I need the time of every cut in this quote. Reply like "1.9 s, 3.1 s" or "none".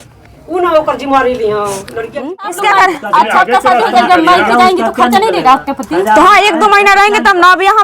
2.3 s